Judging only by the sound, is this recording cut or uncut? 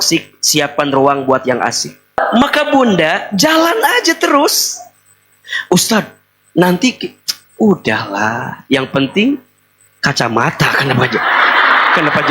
cut